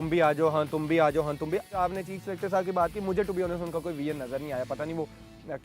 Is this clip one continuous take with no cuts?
no; 1 cut; at 1.8 s

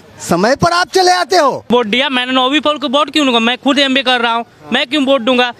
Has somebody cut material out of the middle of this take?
yes; 1 cut; at 1.6 s

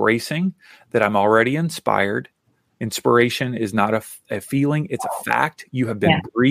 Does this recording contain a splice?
yes; 1 cut; at 4.2 s

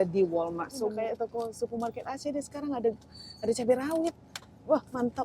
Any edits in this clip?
yes; 1 cut; at 0.9 s

